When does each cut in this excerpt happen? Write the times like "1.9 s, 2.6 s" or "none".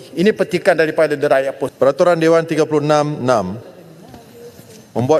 1.6 s